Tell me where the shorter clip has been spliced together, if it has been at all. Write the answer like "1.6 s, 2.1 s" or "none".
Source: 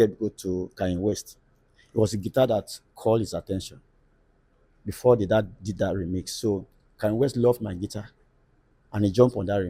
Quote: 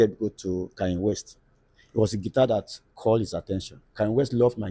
3.8 s

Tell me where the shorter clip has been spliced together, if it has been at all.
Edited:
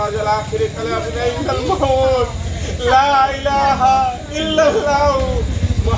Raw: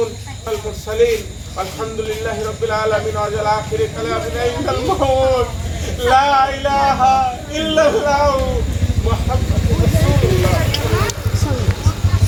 none

